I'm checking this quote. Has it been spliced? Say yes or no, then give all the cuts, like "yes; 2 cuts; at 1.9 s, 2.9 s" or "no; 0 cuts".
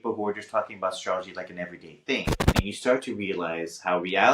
yes; 1 cut; at 2.6 s